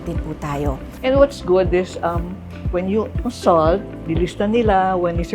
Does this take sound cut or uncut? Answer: cut